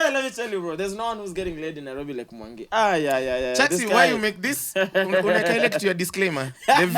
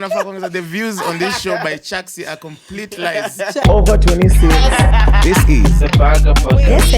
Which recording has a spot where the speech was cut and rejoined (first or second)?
second